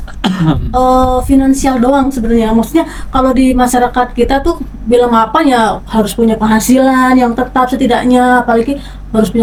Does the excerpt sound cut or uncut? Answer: uncut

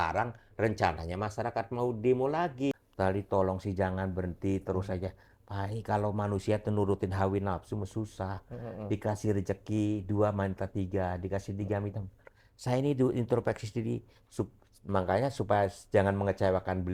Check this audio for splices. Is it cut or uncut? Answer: cut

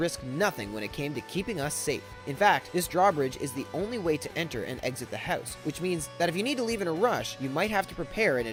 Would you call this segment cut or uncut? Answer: uncut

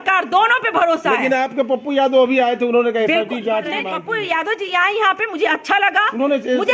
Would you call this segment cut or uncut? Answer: cut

